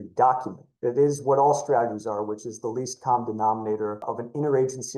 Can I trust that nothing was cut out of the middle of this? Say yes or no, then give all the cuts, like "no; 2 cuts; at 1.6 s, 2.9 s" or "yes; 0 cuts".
no; 1 cut; at 4.0 s